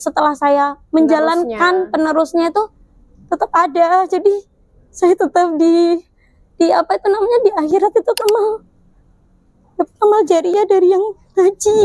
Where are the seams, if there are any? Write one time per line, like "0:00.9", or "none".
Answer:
0:08.2